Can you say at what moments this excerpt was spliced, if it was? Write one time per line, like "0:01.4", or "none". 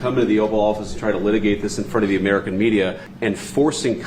0:03.1